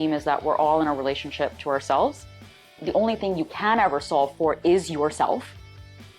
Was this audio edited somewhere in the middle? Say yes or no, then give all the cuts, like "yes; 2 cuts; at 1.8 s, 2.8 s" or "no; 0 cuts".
yes; 1 cut; at 2.7 s